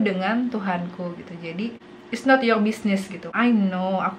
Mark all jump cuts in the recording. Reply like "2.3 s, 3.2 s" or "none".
1.9 s, 3.2 s